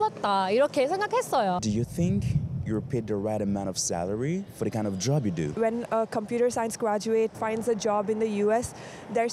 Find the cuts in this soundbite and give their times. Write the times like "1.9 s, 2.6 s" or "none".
1.6 s, 4.5 s, 5.5 s

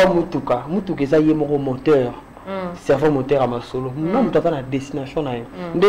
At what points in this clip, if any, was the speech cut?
none

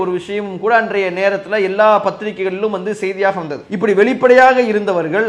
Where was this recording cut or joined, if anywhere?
none

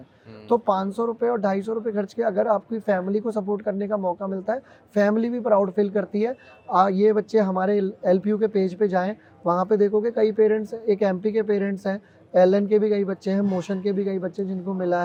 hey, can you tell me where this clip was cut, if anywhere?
none

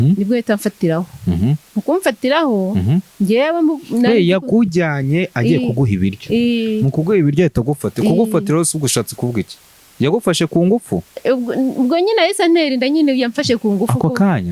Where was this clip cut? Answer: none

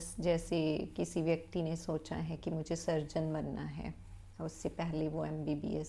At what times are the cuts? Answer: none

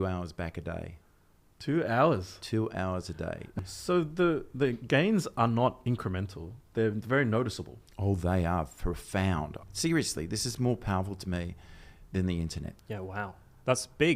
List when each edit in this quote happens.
3.4 s, 9.6 s, 12.6 s

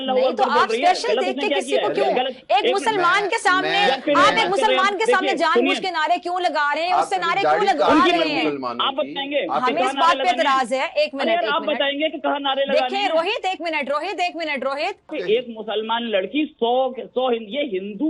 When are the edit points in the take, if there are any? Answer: 15.1 s

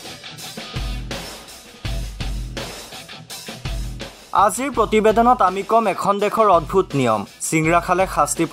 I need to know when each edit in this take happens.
3.9 s

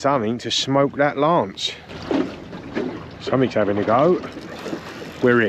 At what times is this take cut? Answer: 1.6 s

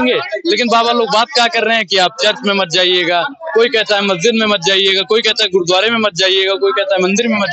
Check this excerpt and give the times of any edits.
none

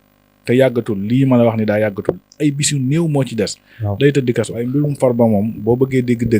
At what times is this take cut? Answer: 4.5 s

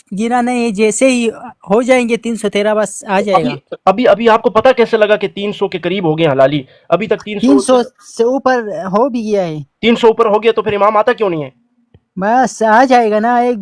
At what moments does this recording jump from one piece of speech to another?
none

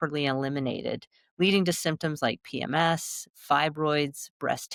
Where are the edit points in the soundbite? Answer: none

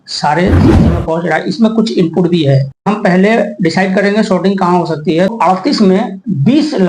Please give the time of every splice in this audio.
2.9 s, 5.3 s

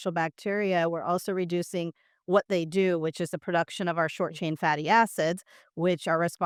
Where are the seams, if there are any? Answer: none

